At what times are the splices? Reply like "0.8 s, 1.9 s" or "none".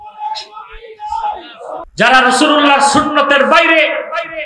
1.9 s